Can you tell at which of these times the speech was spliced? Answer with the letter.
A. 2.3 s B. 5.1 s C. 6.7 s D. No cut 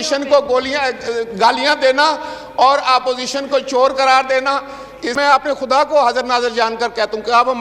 B